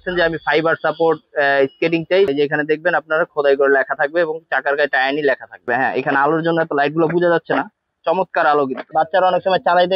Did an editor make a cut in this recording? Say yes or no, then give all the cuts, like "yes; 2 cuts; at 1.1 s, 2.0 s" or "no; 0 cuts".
yes; 3 cuts; at 2.3 s, 5.6 s, 8.8 s